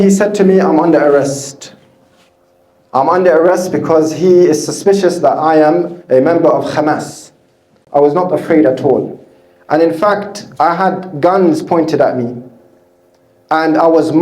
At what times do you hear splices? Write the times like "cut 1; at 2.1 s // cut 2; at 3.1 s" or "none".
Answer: cut 1; at 7.8 s